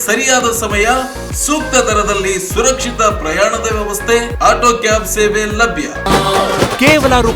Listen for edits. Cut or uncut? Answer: cut